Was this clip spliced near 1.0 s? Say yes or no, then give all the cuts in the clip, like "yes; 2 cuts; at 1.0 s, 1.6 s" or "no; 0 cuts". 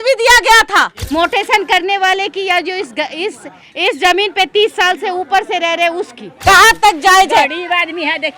yes; 2 cuts; at 1.0 s, 6.3 s